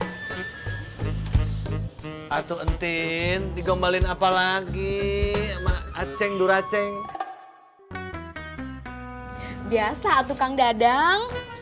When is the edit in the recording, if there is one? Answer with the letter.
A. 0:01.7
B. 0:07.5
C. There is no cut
C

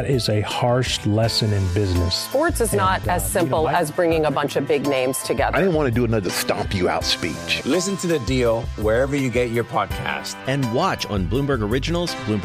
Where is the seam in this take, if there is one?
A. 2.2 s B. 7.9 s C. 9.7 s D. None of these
D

